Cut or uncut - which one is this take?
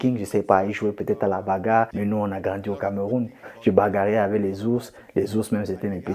cut